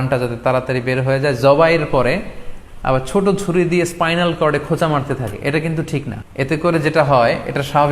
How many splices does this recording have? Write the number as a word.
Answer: one